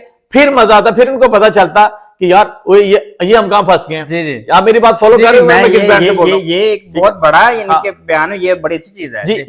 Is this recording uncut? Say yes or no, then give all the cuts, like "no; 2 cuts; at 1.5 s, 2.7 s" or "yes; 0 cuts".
yes; 0 cuts